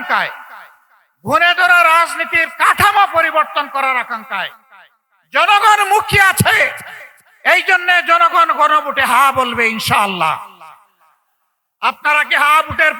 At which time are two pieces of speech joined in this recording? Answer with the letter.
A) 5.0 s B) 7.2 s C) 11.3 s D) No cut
D